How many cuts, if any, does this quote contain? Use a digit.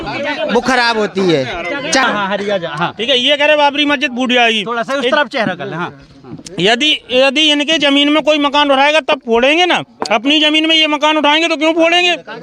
1